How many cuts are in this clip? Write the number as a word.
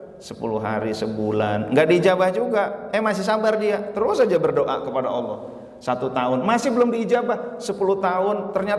zero